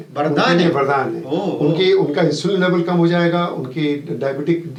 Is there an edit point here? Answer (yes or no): no